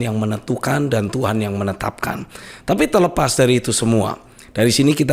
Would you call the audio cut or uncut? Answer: uncut